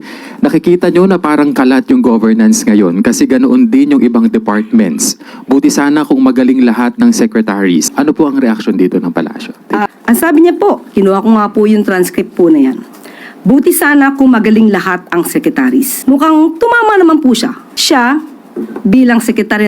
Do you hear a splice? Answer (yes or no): yes